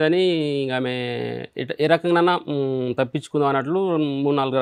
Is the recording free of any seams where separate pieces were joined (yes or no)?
yes